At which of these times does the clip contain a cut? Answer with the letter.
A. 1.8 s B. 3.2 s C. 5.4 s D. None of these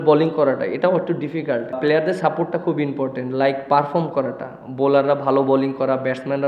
A